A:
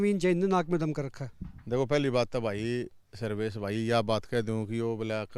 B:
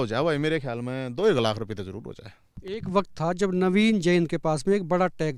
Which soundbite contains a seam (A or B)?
B